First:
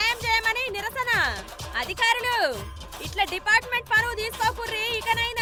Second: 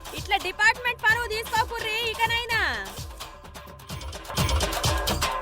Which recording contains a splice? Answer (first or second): second